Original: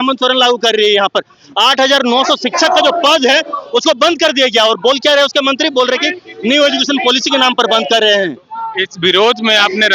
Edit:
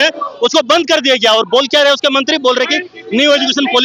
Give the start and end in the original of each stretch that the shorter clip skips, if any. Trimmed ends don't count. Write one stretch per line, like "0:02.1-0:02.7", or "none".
none